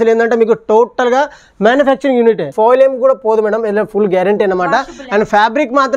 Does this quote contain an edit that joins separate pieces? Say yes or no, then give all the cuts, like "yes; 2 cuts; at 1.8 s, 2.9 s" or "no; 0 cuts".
yes; 1 cut; at 2.5 s